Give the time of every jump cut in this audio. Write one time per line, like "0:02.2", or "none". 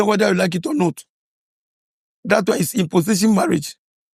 none

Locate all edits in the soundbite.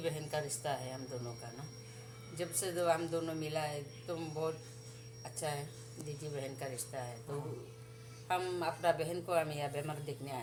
none

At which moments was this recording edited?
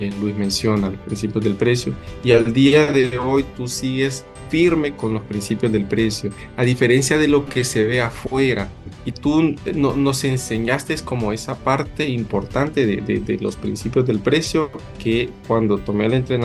none

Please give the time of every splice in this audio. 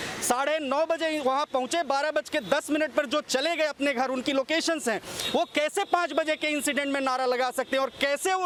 none

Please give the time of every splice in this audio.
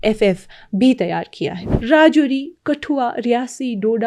0:01.7

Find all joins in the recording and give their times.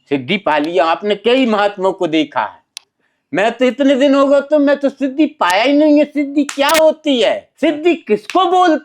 0:07.5

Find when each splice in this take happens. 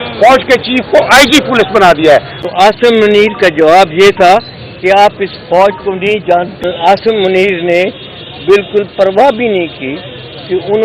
0:02.4
0:06.6

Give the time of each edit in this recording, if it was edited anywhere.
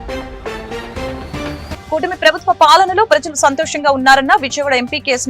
0:01.8

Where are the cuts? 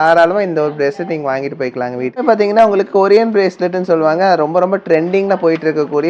0:02.3

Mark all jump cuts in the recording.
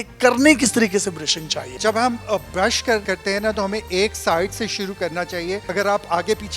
0:01.7
0:05.6

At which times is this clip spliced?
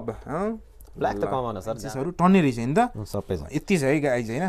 0:01.8

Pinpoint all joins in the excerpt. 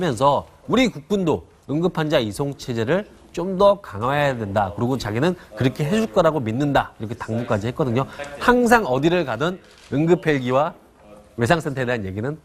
none

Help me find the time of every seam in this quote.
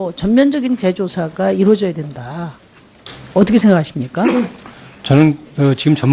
0:04.3

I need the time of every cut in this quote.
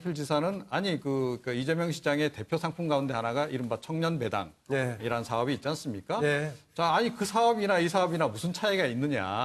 0:03.9

